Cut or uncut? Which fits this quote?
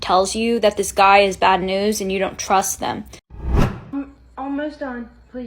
cut